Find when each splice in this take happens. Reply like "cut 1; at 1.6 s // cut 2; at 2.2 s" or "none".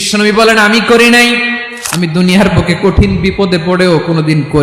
cut 1; at 1.6 s